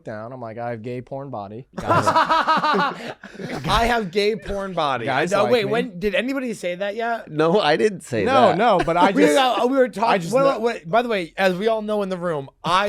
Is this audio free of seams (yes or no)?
no